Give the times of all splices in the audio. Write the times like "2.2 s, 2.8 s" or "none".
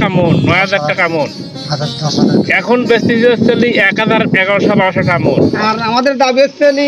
5.6 s